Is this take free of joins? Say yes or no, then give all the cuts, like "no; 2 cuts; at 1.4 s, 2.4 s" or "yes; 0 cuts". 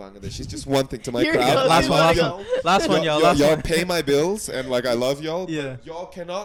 yes; 0 cuts